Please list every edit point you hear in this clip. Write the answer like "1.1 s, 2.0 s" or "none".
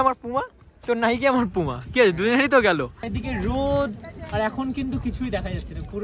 3.0 s